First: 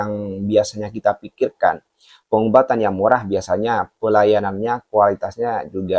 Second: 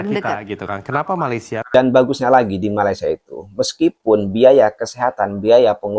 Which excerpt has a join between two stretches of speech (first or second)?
second